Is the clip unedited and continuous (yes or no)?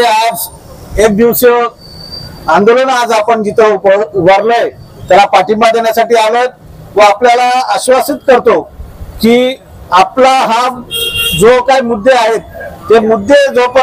yes